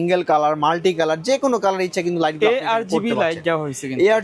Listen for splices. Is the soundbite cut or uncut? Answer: uncut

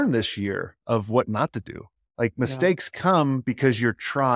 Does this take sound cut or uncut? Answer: uncut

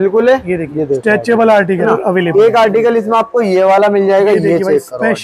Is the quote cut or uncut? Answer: cut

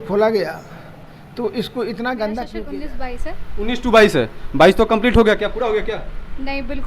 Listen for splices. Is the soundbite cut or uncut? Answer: cut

